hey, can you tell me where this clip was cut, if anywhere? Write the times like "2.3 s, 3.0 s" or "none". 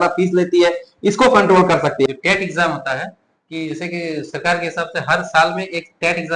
2.1 s